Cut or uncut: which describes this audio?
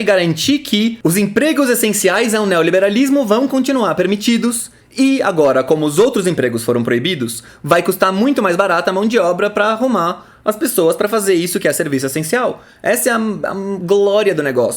cut